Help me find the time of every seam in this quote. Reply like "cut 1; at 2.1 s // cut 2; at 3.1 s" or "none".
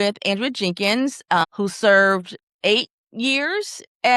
cut 1; at 1.4 s